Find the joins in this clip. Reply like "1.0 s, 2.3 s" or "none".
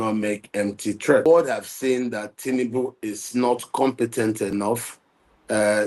1.2 s